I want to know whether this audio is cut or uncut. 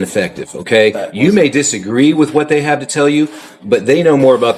uncut